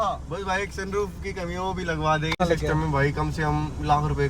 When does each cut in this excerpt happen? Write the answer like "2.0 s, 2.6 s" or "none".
2.3 s

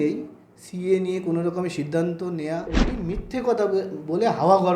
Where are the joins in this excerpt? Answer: 2.9 s

